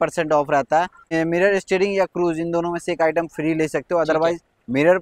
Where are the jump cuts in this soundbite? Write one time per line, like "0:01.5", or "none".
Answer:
none